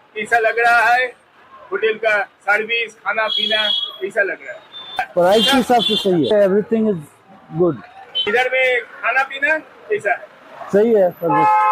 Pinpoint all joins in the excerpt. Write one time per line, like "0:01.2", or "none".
0:05.1
0:06.3